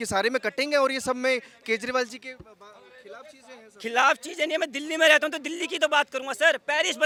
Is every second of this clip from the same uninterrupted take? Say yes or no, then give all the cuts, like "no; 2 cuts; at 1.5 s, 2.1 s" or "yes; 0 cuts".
yes; 0 cuts